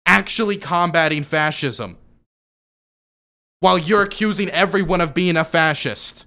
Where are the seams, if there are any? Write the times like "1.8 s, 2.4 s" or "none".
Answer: none